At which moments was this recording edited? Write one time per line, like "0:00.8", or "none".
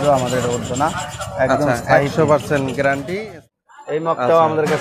0:03.3